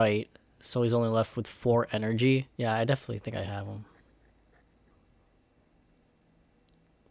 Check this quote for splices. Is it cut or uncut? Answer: cut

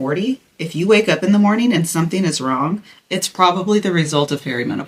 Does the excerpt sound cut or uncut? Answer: uncut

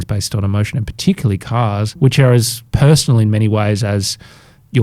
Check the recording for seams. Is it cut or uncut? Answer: cut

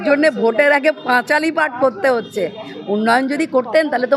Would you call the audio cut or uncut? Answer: uncut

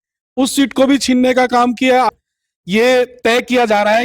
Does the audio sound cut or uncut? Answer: cut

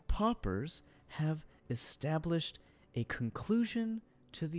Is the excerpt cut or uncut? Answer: uncut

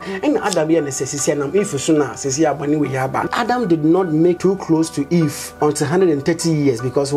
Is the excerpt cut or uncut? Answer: cut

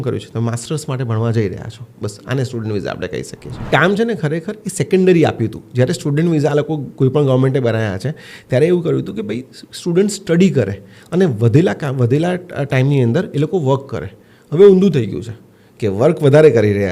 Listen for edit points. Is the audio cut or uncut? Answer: cut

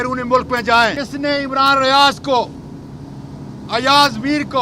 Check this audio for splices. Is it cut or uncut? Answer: cut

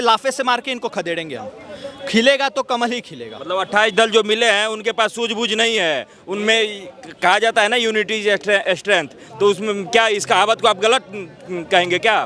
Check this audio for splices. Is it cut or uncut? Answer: uncut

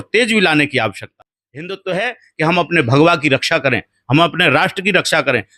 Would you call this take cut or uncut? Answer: cut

